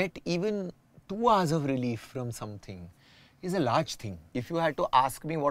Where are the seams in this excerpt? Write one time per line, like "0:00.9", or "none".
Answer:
0:04.3

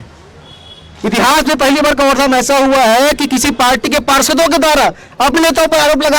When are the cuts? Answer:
none

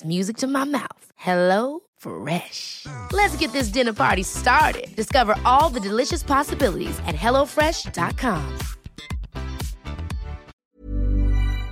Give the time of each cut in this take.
0:10.6

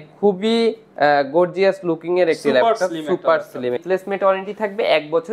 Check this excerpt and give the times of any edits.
0:03.8

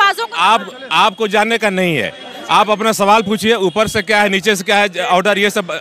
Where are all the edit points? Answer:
none

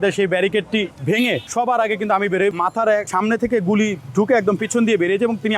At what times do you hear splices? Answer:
0:01.2
0:02.9
0:04.6

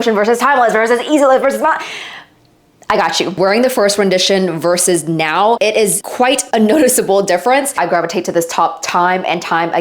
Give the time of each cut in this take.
0:03.4
0:07.8

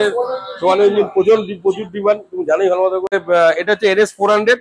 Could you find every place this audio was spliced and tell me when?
0:03.2

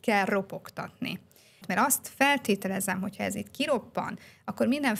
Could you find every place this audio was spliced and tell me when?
0:01.6

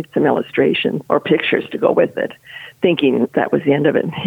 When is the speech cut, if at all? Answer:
0:01.0
0:03.3

